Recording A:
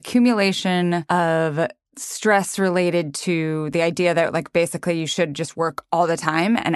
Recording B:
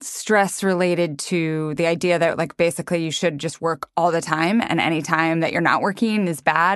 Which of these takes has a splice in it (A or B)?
A